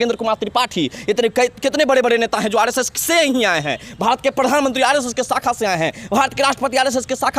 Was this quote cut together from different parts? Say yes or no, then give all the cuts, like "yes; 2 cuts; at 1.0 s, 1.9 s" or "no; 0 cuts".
no; 0 cuts